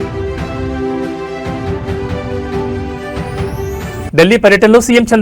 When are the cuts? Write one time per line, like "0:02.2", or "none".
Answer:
0:04.0